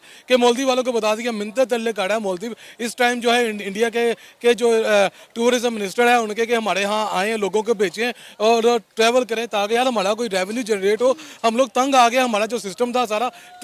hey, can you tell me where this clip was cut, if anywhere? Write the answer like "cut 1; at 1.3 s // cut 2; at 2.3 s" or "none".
none